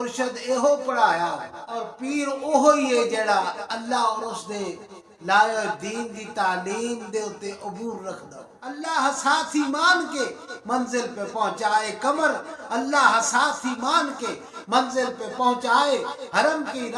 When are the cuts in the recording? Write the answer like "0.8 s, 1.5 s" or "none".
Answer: 1.9 s, 8.8 s